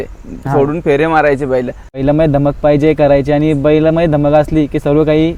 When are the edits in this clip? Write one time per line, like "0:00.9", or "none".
0:01.8